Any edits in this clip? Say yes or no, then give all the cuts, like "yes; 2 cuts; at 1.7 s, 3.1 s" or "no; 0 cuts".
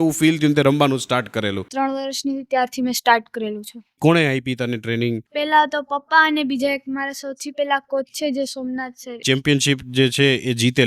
yes; 3 cuts; at 1.7 s, 4.0 s, 9.2 s